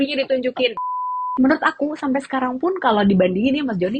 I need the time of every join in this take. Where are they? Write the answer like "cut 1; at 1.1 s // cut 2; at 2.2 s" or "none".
cut 1; at 1.3 s